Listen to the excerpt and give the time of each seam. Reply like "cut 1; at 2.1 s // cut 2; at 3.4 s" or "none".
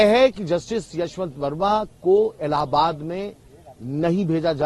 none

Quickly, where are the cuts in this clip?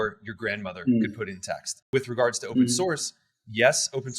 cut 1; at 1.7 s

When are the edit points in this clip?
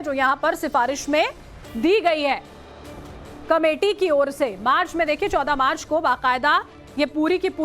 cut 1; at 4.1 s

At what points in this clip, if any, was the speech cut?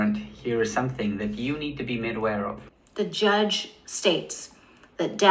cut 1; at 2.6 s

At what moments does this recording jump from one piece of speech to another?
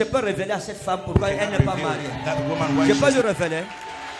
none

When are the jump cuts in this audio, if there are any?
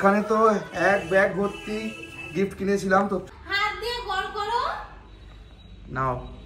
cut 1; at 3.2 s

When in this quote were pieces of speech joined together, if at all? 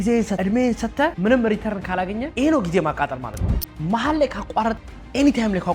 cut 1; at 2.3 s // cut 2; at 3.4 s

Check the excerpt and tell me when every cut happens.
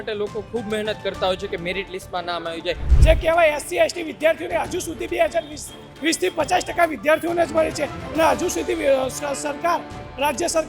cut 1; at 2.8 s

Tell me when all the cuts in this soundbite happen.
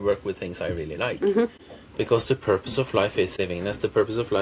cut 1; at 1.6 s // cut 2; at 3.3 s

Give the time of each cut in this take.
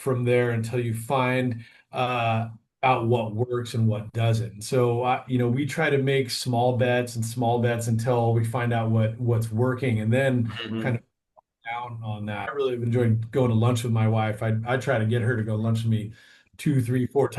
cut 1; at 12.5 s

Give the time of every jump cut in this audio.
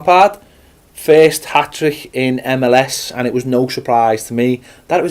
cut 1; at 2.0 s

